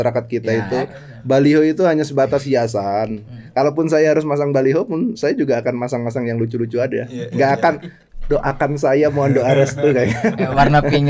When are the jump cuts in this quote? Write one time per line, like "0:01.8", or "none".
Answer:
0:03.4